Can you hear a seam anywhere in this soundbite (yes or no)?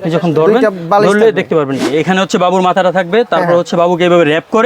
yes